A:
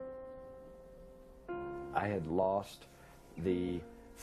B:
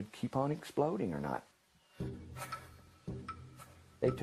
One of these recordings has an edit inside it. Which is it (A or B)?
A